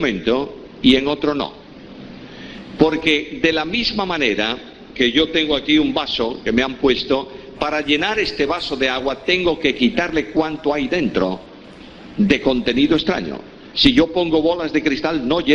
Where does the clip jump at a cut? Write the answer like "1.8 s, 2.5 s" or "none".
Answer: none